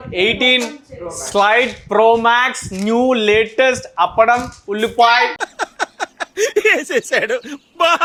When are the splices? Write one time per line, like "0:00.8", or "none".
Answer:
none